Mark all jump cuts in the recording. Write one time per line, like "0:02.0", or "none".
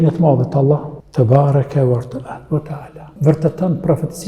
0:01.0
0:03.0